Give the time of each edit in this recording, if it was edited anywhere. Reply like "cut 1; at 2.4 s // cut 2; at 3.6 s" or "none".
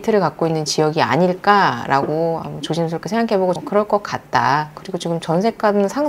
cut 1; at 3.6 s